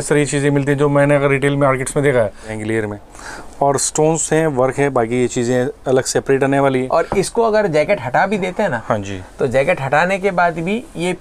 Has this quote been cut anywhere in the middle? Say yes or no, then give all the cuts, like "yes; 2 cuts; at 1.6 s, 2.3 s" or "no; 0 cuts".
yes; 1 cut; at 2.5 s